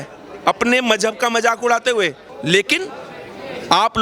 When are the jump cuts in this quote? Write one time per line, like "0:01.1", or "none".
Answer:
0:02.3